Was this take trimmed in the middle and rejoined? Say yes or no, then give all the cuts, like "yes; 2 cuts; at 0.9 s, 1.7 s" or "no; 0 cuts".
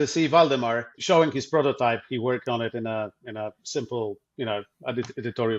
yes; 1 cut; at 0.9 s